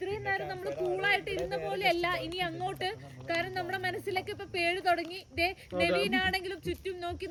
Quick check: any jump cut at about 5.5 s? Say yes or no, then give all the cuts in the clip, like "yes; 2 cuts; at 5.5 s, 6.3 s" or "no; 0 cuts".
no; 0 cuts